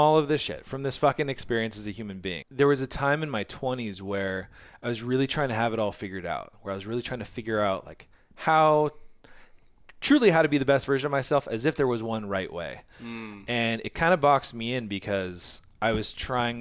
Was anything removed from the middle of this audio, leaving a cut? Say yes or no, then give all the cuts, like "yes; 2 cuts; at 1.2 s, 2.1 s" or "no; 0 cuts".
yes; 1 cut; at 2.4 s